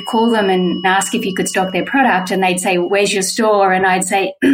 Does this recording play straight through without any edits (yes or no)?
no